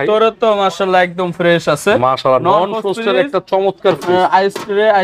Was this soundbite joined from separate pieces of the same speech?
no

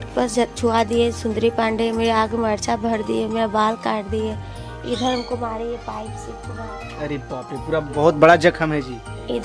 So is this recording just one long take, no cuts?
yes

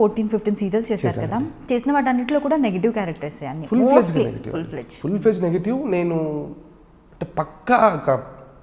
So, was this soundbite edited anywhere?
no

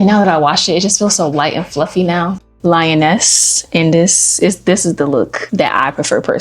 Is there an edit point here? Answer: yes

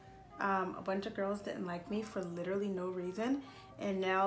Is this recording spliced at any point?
no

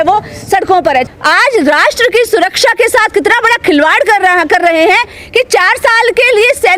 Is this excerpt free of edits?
no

